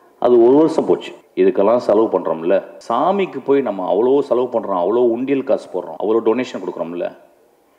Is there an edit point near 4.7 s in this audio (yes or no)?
no